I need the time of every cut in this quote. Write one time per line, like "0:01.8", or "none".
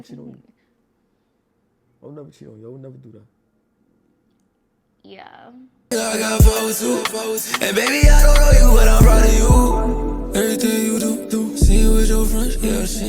0:05.7